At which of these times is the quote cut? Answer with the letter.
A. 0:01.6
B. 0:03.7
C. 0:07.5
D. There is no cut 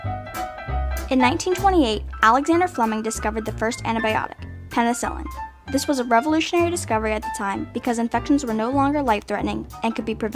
C